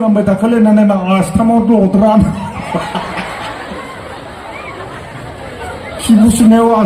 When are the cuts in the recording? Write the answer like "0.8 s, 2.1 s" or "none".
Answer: none